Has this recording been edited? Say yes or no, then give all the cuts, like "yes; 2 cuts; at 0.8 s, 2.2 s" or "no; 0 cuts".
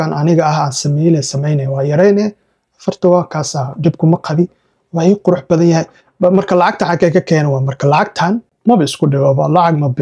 yes; 1 cut; at 8.5 s